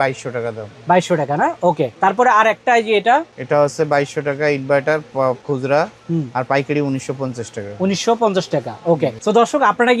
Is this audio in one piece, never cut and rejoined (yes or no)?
yes